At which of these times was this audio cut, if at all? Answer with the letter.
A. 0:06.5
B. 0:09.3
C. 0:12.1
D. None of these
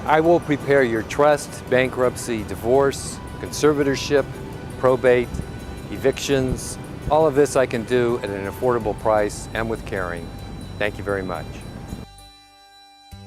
C